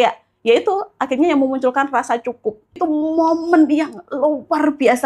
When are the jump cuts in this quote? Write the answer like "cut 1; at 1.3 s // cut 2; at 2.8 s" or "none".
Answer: cut 1; at 2.8 s